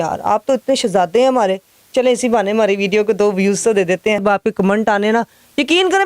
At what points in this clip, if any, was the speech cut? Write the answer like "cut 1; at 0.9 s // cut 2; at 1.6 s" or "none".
cut 1; at 4.2 s